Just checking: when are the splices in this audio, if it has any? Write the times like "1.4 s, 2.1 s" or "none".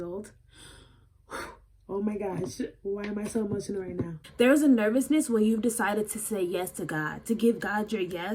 4.2 s